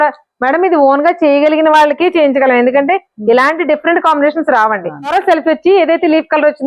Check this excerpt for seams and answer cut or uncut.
cut